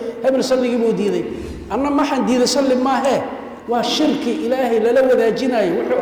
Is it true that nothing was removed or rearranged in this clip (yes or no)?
yes